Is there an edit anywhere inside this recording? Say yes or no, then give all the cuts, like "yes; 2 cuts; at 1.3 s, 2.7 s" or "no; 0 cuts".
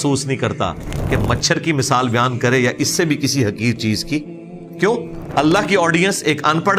yes; 1 cut; at 5.2 s